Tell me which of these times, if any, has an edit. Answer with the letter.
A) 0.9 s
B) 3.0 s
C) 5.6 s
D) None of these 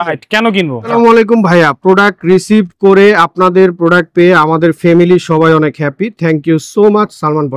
A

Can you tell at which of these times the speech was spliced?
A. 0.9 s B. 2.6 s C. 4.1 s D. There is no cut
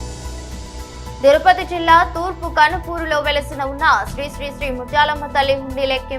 A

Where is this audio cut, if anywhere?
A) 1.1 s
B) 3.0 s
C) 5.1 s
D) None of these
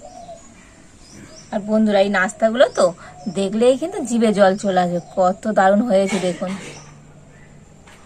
A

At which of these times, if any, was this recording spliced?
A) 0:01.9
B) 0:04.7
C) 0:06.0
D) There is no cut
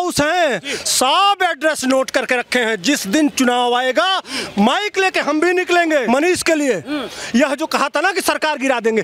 C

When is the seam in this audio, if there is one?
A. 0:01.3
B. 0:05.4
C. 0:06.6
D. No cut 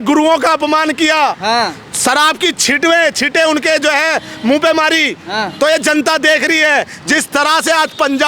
D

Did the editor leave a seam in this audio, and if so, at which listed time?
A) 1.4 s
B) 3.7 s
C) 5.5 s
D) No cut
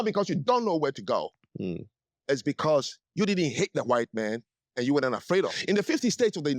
C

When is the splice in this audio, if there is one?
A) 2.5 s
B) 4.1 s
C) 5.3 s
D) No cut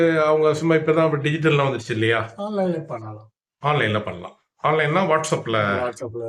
D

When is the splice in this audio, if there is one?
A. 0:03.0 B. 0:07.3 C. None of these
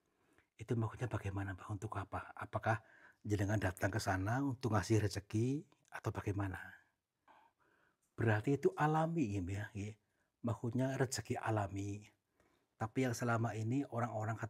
B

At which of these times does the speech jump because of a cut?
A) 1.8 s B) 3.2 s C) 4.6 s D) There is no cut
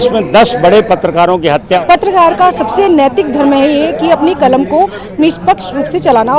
A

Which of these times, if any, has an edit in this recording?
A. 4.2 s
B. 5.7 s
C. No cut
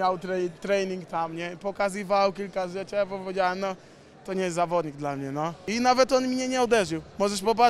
B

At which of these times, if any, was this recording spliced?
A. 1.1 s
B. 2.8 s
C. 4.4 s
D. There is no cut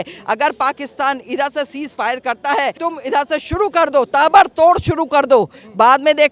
B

